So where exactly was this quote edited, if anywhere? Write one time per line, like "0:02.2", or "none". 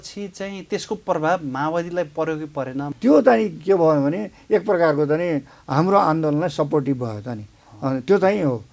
0:02.9